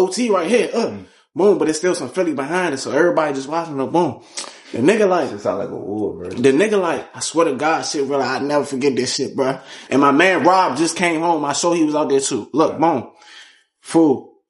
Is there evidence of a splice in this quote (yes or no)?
no